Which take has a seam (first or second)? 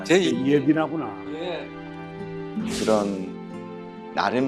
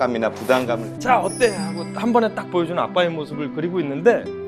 second